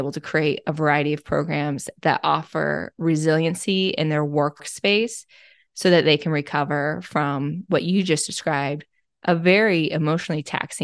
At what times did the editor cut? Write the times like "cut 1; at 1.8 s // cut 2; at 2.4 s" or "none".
cut 1; at 4.6 s